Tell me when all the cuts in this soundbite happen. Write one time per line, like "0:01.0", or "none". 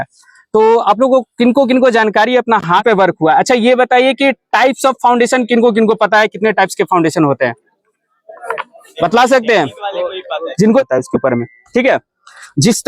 0:02.8
0:10.8